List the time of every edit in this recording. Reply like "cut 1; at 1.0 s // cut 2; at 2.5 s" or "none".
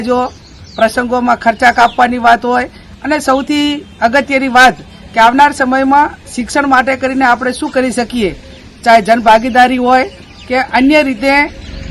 none